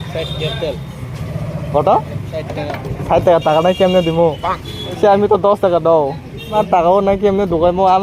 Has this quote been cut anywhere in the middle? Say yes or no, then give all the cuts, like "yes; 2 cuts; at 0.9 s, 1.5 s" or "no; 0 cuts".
yes; 2 cuts; at 5.0 s, 6.5 s